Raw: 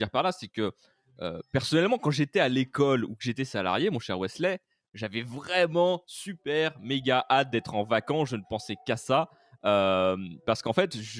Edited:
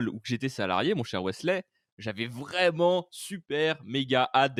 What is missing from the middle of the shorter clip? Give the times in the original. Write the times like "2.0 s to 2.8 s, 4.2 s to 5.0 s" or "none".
none